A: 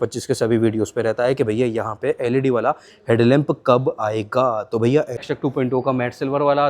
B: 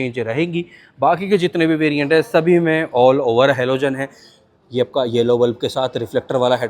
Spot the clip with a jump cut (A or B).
A